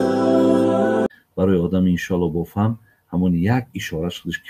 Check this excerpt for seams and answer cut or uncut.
cut